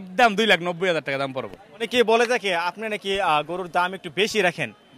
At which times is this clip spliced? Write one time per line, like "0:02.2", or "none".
0:01.9